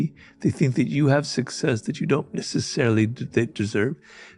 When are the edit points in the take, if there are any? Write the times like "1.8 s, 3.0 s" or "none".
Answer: none